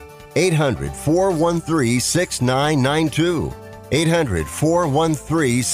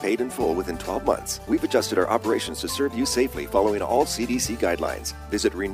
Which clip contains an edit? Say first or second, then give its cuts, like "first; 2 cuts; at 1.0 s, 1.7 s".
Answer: second; 1 cut; at 1.3 s